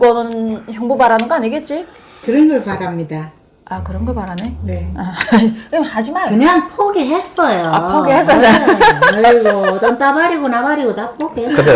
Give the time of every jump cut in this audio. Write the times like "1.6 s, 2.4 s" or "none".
none